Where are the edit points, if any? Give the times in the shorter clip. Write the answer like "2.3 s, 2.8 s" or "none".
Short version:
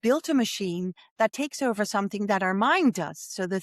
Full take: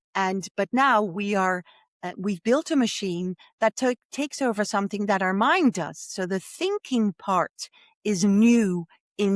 1.3 s